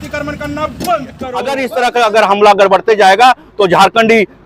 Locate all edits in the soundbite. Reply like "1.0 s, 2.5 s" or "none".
1.6 s